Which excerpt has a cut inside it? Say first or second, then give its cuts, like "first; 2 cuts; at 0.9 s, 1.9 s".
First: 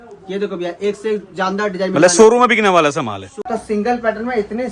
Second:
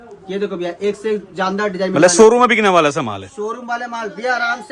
first; 1 cut; at 3.3 s